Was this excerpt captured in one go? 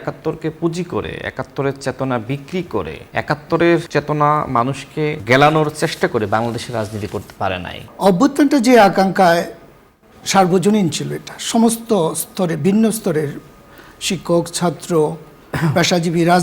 no; 4 cuts; at 3.0 s, 3.9 s, 5.2 s, 7.8 s

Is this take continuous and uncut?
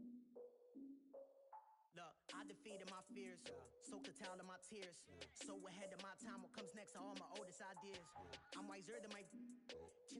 no; 1 cut; at 1.8 s

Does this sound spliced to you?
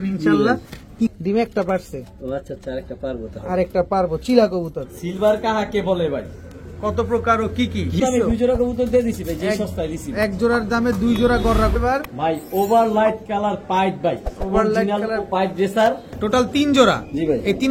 yes; 5 cuts; at 1.1 s, 4.9 s, 8.0 s, 11.8 s, 16.1 s

